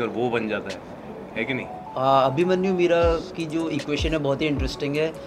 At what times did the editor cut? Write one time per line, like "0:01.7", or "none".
0:01.8